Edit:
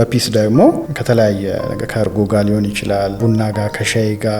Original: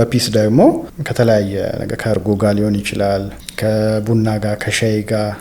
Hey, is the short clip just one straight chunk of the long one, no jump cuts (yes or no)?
no